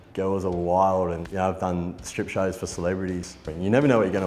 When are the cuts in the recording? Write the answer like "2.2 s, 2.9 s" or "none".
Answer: 3.3 s